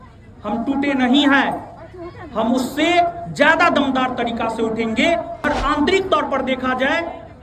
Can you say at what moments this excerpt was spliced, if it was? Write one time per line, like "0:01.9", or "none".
0:05.4